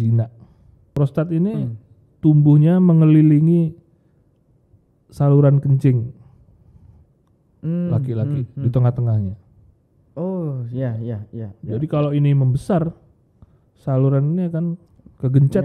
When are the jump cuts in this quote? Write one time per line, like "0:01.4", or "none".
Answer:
0:00.9